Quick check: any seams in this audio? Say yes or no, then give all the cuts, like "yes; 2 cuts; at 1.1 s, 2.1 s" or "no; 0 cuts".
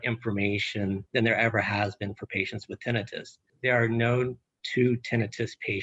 yes; 2 cuts; at 1.1 s, 3.4 s